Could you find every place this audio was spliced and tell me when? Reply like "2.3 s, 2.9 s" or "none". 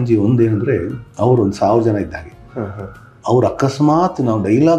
none